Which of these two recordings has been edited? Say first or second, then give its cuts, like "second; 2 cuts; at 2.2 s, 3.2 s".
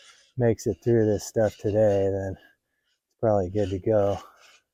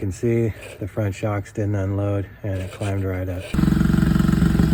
second; 1 cut; at 3.6 s